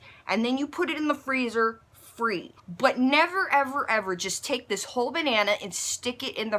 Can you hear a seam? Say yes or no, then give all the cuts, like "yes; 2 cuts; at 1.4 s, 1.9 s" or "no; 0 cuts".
yes; 1 cut; at 2.6 s